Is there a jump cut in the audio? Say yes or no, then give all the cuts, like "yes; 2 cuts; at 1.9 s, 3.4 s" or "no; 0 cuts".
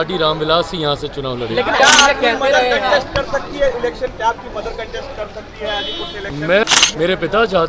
yes; 2 cuts; at 1.8 s, 6.6 s